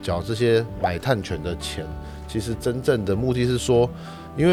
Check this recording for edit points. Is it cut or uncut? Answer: uncut